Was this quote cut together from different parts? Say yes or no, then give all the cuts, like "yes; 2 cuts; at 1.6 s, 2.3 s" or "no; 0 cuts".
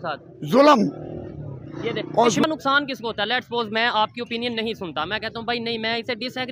yes; 1 cut; at 2.4 s